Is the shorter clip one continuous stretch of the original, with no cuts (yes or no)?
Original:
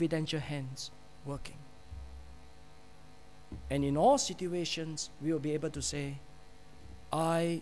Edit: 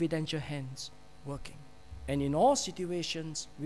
no